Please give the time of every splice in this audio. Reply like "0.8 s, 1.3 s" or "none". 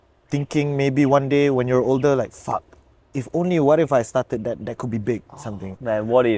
none